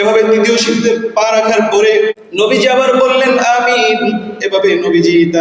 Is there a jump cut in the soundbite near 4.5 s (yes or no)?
no